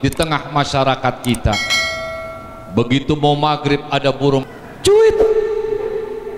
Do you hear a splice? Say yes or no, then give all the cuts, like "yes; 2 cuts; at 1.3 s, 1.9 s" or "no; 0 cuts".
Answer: yes; 1 cut; at 4.4 s